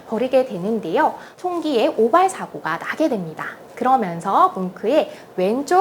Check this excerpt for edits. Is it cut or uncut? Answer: cut